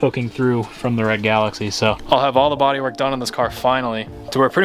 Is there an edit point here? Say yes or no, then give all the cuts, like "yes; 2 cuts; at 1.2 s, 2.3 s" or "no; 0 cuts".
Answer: yes; 1 cut; at 2.0 s